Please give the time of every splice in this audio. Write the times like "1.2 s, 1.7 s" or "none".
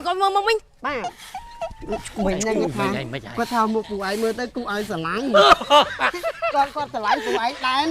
none

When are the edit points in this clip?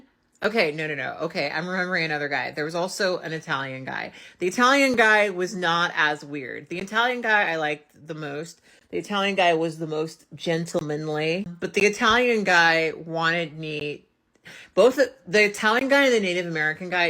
11.5 s

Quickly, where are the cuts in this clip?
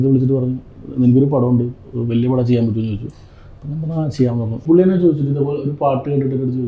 4.6 s

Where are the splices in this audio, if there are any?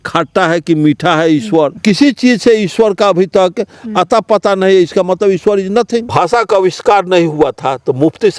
1.8 s, 6.1 s

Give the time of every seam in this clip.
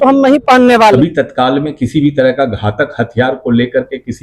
1.0 s

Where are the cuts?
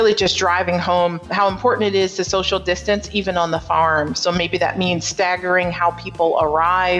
1.3 s

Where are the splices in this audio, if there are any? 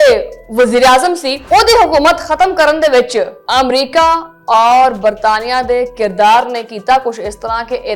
none

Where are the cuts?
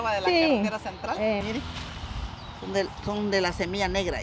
1.4 s

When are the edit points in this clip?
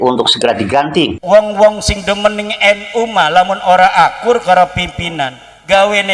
1.2 s

